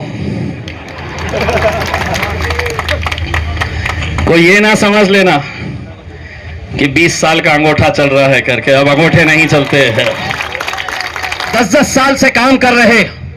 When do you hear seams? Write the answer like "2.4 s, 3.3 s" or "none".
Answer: 11.5 s